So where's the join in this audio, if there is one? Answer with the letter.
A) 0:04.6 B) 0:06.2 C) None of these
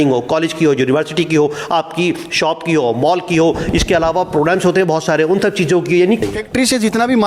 B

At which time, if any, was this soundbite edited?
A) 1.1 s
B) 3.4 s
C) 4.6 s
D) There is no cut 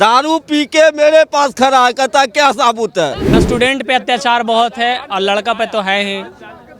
B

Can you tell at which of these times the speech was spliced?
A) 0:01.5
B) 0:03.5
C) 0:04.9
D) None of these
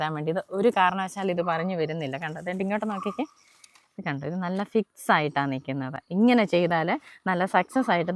D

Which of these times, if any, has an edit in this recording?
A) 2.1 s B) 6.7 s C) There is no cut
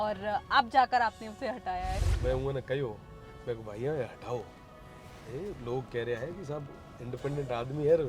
A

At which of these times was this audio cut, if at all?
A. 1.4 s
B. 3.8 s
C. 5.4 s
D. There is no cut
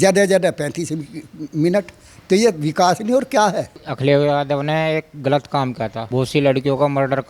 B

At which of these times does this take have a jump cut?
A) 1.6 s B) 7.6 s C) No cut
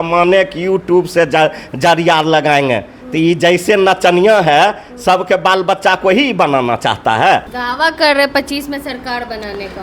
B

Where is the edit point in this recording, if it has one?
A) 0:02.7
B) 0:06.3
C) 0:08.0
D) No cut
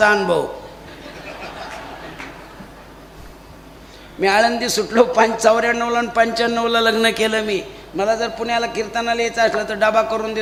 D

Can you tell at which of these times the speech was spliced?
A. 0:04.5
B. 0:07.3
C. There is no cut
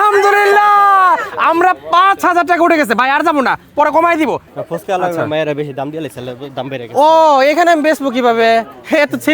A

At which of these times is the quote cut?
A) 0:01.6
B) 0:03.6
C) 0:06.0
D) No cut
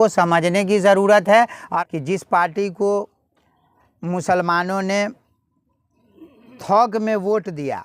A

